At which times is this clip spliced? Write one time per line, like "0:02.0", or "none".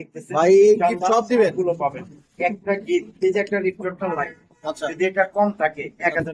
none